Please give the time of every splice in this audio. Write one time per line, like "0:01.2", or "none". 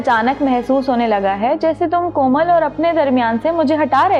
none